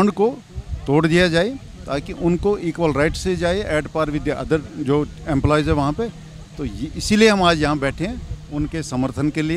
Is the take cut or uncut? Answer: uncut